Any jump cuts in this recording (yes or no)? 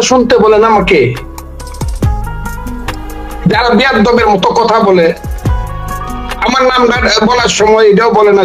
no